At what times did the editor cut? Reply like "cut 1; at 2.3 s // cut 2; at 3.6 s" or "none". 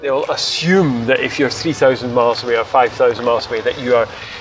none